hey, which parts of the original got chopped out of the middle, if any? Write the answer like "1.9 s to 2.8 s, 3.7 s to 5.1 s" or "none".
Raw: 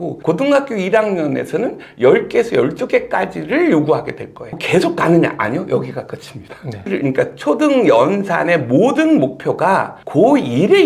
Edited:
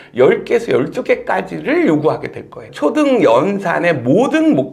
4.5 s to 7.3 s

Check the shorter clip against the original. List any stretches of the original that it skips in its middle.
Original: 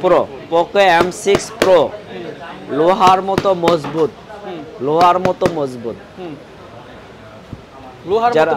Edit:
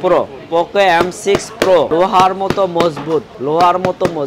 1.9 s to 2.8 s, 4.2 s to 4.7 s

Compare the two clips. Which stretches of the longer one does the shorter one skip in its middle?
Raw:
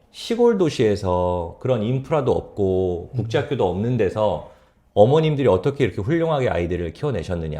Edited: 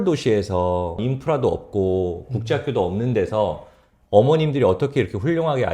1.5 s to 1.8 s

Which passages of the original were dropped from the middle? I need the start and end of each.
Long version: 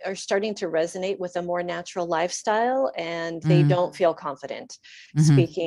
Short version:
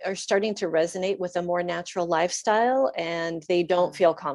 none

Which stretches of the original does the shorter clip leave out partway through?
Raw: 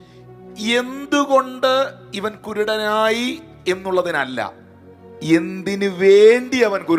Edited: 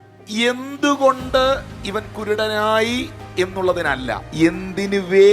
4.5 s to 5.1 s

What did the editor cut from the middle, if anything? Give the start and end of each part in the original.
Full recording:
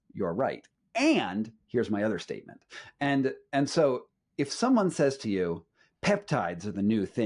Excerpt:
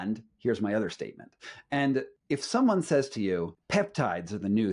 3.4 s to 4.2 s, 5.7 s to 5.9 s

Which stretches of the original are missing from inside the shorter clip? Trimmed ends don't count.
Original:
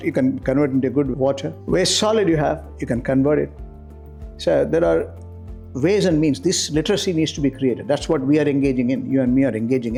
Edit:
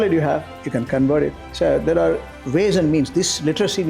3.6 s to 4.3 s, 5.2 s to 5.6 s

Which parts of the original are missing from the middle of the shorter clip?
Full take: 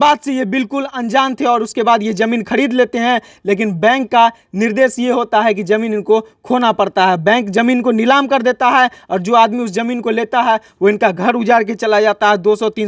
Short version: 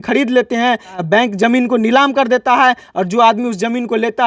3.4 s to 7.2 s

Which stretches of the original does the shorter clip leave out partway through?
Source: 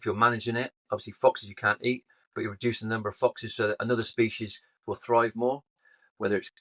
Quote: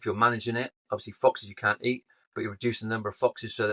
none

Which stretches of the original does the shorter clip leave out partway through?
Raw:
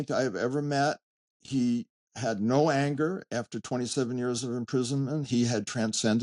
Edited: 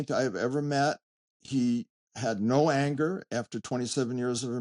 none

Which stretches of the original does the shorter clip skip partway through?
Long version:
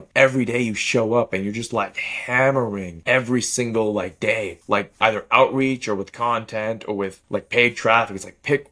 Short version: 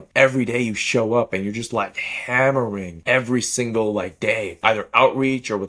4.5 s to 4.9 s

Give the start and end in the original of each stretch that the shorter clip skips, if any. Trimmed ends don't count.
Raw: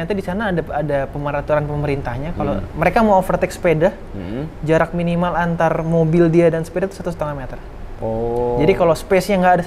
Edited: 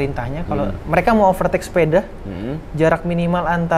none

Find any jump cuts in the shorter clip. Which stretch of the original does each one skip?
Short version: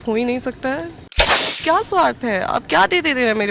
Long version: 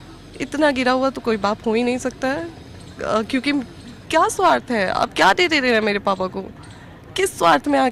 2.9 s to 3.8 s

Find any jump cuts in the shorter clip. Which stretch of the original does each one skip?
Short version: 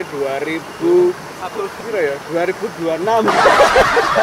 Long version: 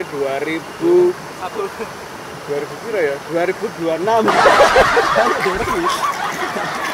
1.8 s to 2.8 s

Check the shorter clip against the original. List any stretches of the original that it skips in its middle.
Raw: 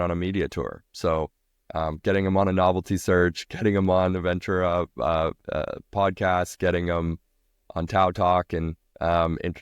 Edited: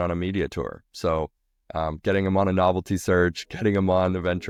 none

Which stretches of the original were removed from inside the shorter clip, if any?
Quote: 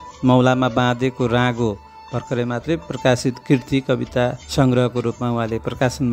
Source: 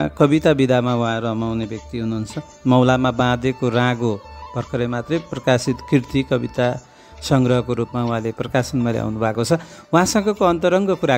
6.8 s to 7.2 s

